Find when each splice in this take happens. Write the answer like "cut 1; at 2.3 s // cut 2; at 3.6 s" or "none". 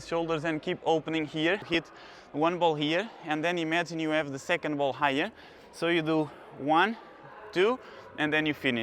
cut 1; at 1.7 s

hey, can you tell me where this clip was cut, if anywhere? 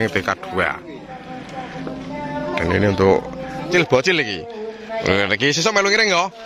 cut 1; at 3.7 s

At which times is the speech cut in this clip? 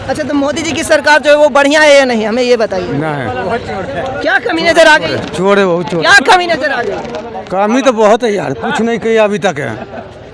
none

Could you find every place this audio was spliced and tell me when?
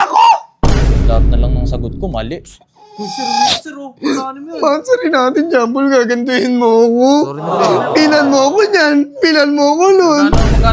none

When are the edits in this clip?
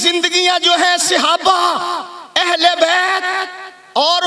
none

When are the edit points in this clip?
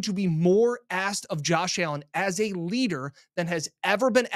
none

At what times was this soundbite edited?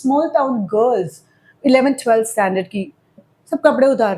cut 1; at 3.2 s

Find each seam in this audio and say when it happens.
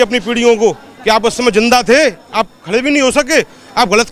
none

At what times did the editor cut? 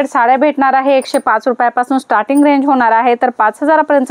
none

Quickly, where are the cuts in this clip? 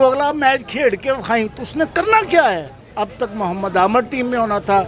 cut 1; at 2.8 s

